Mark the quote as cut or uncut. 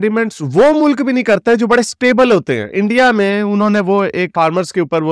uncut